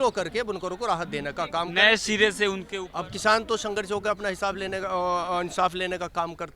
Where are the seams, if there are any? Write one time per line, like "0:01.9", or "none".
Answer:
0:02.7